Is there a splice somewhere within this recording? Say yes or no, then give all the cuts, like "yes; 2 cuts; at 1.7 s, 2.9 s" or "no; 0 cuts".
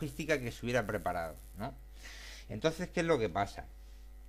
no; 0 cuts